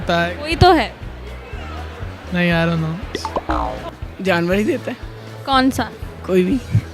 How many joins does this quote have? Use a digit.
1